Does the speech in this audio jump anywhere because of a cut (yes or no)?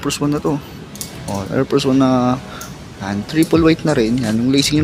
no